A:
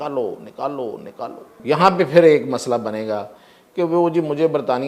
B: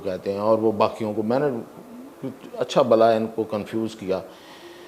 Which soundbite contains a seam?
A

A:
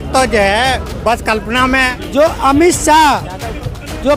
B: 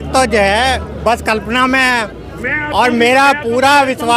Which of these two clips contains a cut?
A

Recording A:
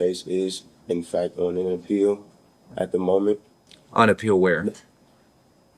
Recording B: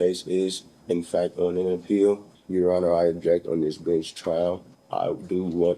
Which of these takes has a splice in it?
B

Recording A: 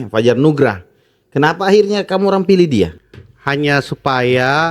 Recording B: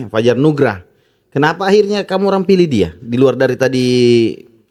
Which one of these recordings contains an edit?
A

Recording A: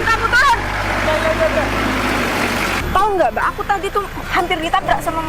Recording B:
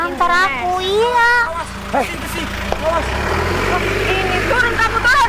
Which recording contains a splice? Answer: A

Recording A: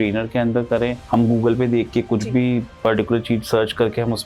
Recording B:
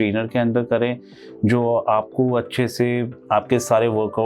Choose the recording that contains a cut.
A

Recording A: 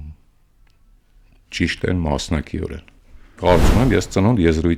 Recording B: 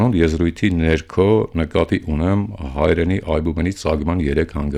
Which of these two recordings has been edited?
A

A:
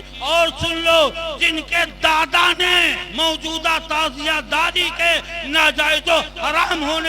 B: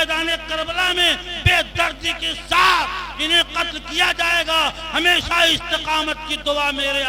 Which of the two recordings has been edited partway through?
A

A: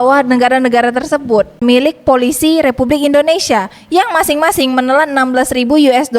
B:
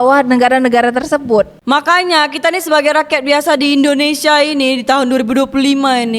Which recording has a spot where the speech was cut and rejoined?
A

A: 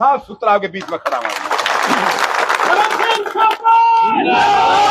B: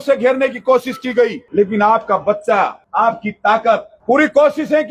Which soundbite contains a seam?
B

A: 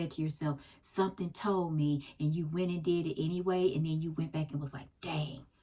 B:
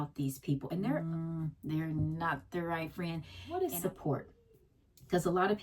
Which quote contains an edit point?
B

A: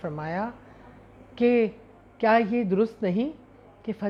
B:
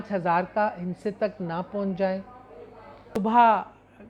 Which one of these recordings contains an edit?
B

